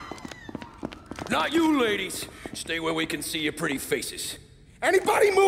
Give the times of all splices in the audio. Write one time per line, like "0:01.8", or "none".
none